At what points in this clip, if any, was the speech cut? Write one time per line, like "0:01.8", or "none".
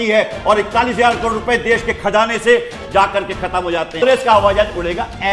0:04.0

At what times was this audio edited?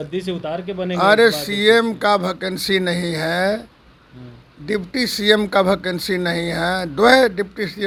none

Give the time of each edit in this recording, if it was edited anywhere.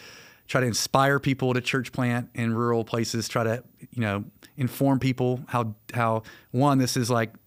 none

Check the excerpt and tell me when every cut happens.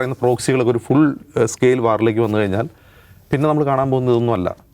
none

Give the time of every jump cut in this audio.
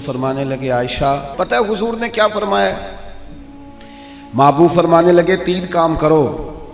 0:01.3

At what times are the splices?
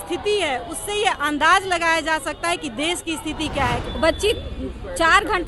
0:03.9

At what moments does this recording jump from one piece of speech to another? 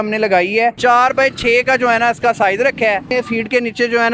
0:00.8
0:03.1

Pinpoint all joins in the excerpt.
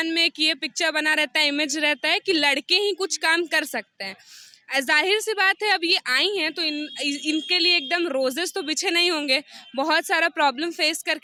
none

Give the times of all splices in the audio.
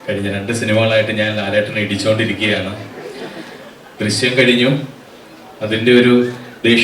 none

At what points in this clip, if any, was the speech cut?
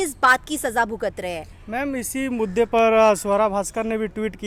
none

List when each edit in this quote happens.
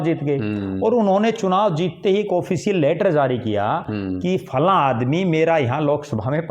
none

